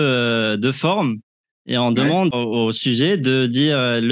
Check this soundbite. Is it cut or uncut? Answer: cut